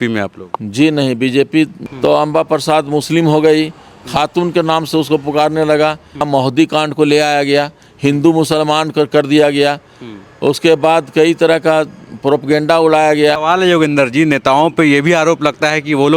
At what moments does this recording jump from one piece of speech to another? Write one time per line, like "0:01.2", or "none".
0:01.8
0:06.2
0:13.4